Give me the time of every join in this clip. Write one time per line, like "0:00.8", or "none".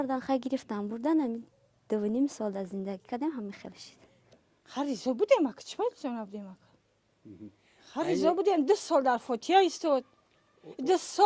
none